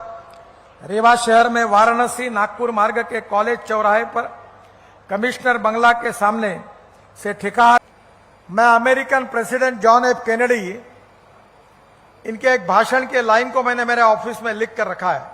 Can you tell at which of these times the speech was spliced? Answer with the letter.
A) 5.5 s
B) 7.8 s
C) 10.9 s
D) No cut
B